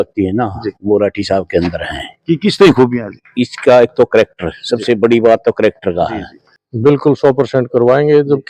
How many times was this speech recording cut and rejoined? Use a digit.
1